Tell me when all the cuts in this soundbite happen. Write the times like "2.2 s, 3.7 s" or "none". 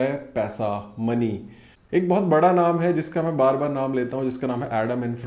1.8 s